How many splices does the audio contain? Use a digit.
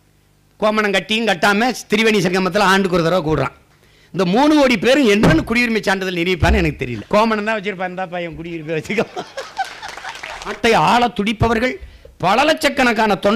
2